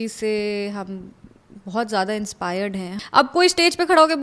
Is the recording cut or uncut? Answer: cut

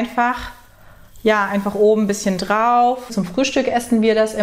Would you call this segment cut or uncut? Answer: cut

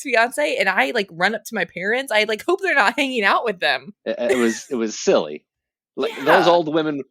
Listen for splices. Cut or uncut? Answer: cut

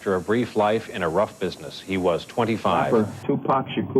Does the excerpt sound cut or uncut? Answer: cut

